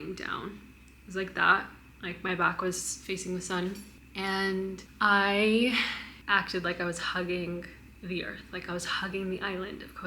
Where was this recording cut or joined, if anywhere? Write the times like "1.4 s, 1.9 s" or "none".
6.1 s